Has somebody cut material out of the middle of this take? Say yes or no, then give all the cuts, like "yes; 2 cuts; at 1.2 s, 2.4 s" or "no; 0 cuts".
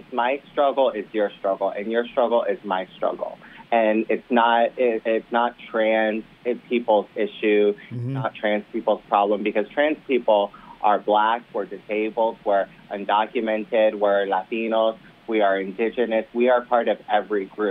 no; 0 cuts